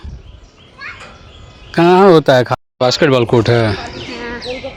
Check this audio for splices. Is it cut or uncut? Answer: cut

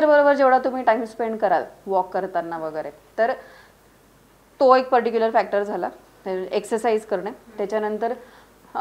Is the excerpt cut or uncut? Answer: uncut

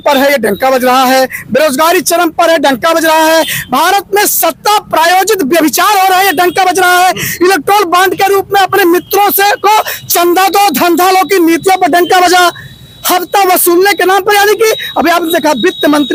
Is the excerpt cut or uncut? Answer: uncut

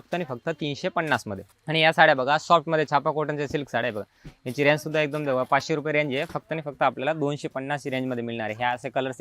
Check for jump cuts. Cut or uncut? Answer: uncut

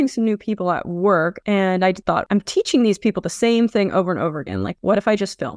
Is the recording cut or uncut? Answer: cut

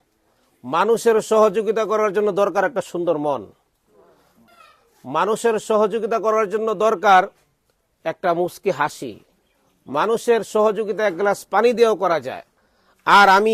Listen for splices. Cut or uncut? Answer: cut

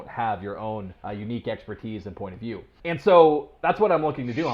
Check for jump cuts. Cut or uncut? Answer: cut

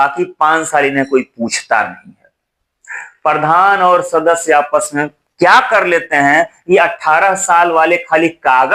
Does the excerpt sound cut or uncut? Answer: uncut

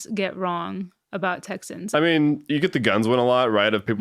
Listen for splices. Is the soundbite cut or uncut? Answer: cut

